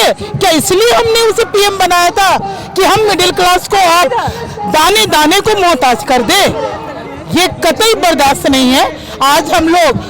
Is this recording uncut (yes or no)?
yes